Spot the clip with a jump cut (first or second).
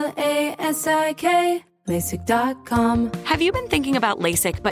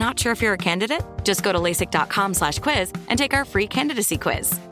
first